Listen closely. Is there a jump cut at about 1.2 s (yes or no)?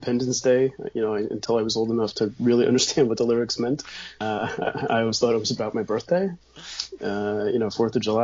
no